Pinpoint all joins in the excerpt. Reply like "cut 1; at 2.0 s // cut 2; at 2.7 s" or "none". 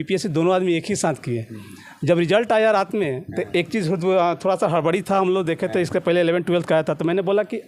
none

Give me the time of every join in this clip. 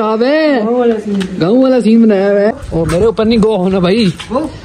cut 1; at 2.5 s

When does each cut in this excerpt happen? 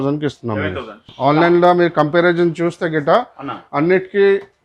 cut 1; at 1.0 s

